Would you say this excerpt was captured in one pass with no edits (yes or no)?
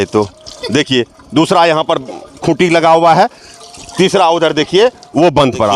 yes